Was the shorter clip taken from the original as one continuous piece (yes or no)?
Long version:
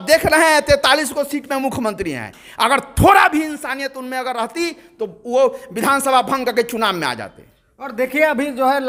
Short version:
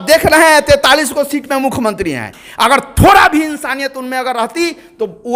yes